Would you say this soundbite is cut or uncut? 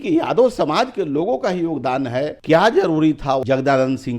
cut